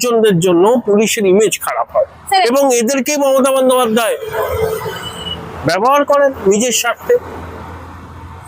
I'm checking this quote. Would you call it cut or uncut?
uncut